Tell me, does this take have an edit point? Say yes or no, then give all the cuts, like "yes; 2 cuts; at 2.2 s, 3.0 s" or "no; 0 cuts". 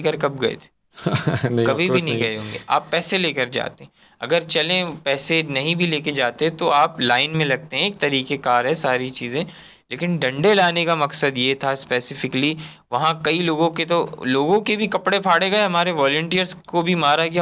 no; 0 cuts